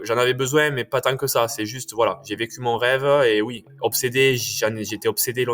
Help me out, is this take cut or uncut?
cut